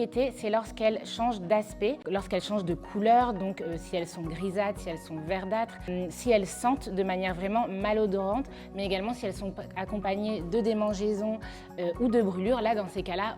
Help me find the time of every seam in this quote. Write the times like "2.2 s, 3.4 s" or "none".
2.0 s, 5.9 s